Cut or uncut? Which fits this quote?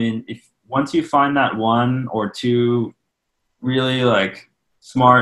uncut